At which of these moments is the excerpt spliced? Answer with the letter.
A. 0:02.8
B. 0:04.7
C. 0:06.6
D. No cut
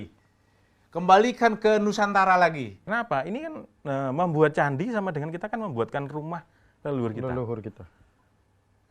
A